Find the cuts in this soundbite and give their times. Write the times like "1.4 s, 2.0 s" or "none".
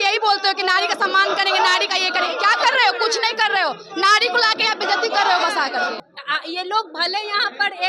6.0 s